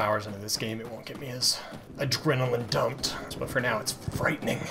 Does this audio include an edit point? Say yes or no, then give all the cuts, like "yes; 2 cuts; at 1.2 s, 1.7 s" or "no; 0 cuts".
yes; 2 cuts; at 1.8 s, 3.2 s